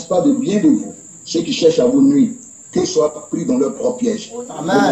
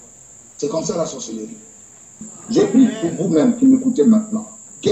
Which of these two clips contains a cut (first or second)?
second